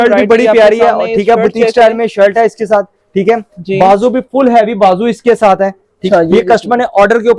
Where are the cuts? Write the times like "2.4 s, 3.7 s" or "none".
6.0 s